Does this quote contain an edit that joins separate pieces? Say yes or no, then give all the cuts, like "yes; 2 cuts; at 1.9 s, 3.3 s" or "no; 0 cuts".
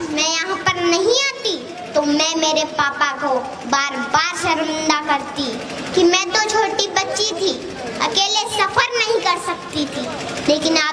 no; 0 cuts